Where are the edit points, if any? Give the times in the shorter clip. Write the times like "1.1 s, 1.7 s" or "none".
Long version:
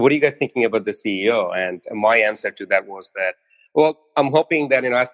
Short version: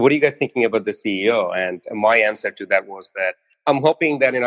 3.5 s